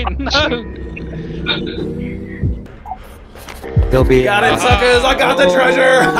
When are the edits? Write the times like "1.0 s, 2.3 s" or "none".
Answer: 2.7 s